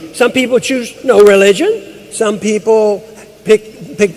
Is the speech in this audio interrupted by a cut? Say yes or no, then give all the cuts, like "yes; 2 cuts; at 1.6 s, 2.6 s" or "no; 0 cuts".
yes; 1 cut; at 2.7 s